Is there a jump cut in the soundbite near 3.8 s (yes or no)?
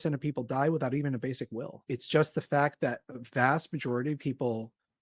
no